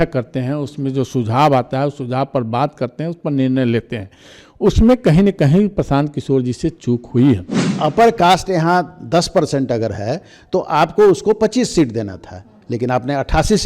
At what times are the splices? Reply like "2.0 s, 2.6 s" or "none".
7.7 s